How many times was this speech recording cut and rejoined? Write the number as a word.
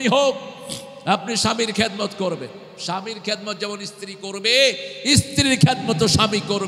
zero